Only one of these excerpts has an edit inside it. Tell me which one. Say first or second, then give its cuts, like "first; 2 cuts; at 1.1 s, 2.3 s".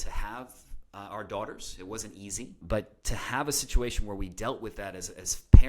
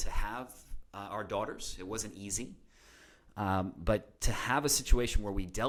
first; 1 cut; at 2.6 s